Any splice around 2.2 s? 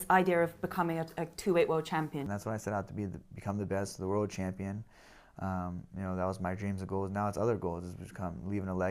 yes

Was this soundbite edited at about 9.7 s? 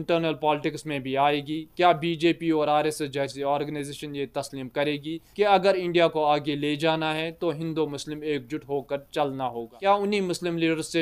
yes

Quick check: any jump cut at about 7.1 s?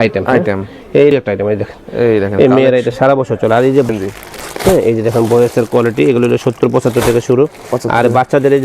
no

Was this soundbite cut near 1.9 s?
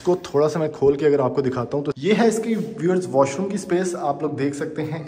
yes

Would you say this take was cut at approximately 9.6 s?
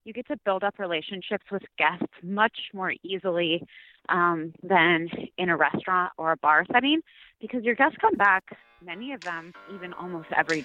yes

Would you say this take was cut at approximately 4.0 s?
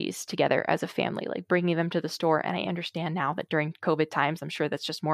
no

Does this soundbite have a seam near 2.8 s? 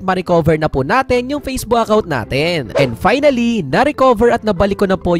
yes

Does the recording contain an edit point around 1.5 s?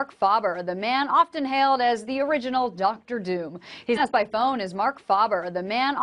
no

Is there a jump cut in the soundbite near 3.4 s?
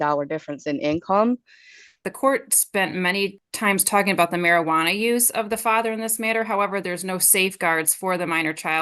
yes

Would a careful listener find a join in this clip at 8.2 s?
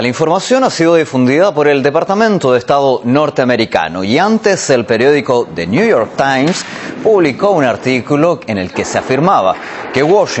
yes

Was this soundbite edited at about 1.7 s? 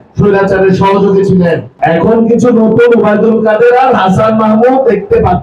yes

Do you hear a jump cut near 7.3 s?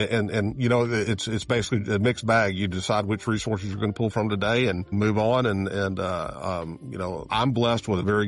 yes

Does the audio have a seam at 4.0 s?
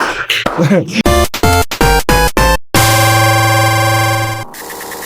no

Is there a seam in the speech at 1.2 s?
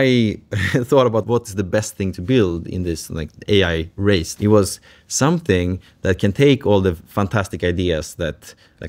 yes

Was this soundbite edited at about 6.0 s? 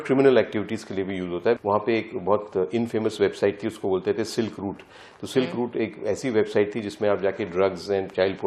no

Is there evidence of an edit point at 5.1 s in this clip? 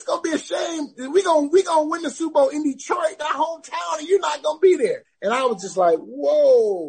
yes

